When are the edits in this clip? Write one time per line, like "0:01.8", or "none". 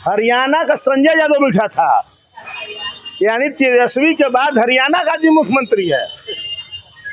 none